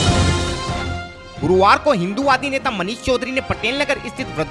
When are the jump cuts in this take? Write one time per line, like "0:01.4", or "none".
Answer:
0:01.2